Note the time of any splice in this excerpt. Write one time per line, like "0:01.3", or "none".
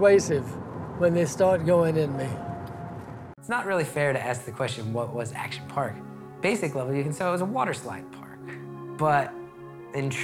0:03.4